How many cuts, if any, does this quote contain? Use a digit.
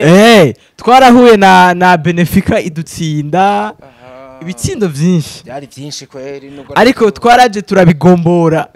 0